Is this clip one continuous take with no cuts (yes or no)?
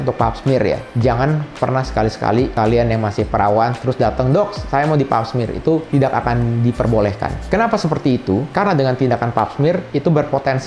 no